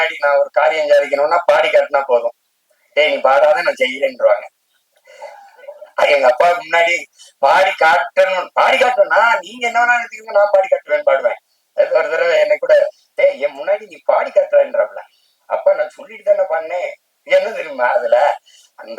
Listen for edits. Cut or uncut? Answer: uncut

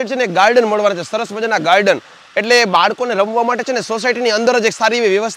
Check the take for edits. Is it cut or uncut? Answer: uncut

